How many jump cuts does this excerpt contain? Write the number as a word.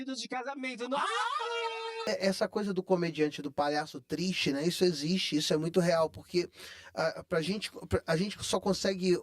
one